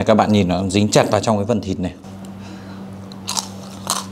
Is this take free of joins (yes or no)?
no